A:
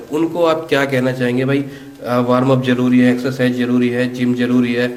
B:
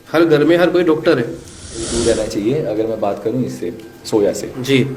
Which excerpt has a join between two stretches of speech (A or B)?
B